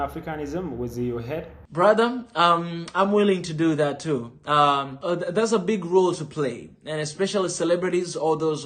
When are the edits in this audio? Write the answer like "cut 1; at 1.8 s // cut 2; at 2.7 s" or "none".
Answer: cut 1; at 1.7 s // cut 2; at 4.9 s